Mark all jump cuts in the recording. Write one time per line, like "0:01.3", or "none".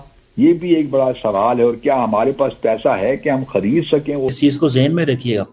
0:04.3